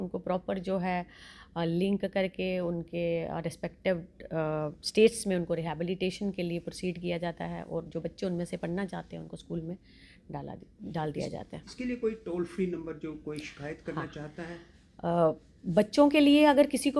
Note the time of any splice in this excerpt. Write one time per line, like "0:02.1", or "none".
none